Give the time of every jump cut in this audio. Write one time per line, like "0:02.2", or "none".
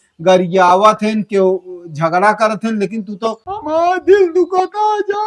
0:03.5

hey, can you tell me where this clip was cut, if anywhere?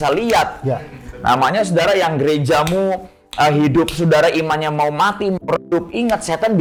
none

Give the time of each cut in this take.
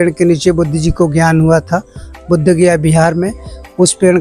none

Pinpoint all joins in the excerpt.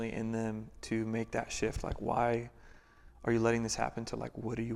none

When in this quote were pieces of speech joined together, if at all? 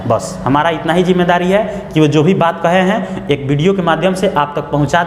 none

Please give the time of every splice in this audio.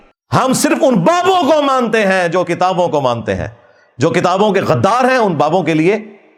none

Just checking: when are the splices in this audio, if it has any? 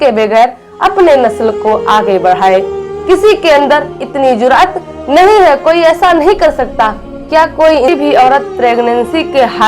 0:07.9

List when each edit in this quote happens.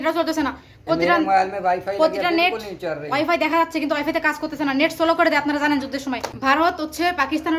0:06.3

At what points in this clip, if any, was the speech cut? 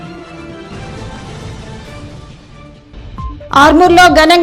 none

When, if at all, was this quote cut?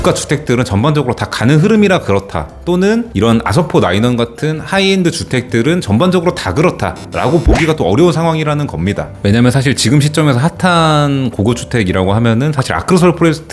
0:09.1

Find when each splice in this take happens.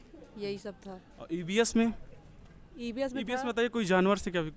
none

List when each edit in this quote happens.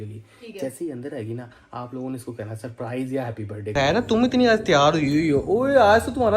0:03.5

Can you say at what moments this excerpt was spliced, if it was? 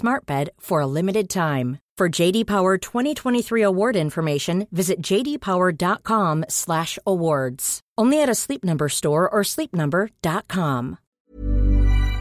0:11.1

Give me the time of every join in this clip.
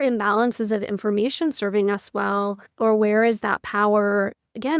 0:02.7

